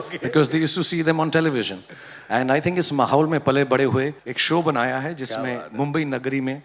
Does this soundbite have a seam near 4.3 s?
yes; 1 cut; at 4.3 s

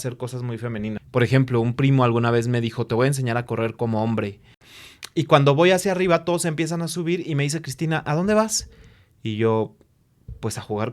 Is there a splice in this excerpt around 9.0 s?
no; 2 cuts; at 1.0 s, 4.7 s

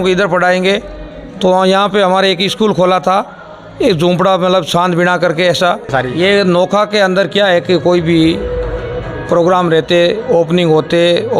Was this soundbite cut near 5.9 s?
yes; 1 cut; at 5.9 s

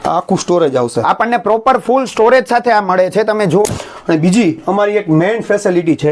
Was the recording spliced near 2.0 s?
no; 1 cut; at 3.8 s

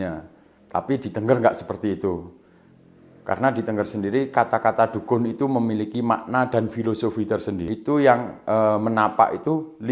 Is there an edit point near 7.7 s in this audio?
yes; 1 cut; at 7.7 s

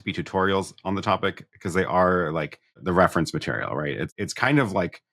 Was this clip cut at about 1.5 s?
no; 2 cuts; at 2.8 s, 4.1 s

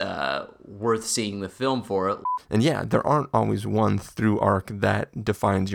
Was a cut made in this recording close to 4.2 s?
no; 1 cut; at 2.2 s

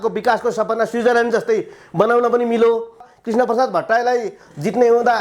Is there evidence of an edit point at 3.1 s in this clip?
yes; 1 cut; at 3.1 s

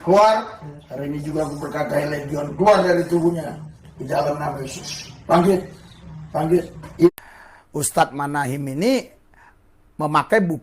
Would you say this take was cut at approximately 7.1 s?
yes; 1 cut; at 7.1 s

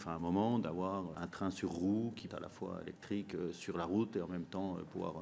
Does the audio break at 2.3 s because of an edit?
yes; 2 cuts; at 1.2 s, 2.3 s

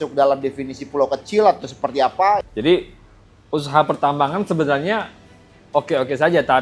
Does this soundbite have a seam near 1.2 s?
no; 1 cut; at 2.4 s

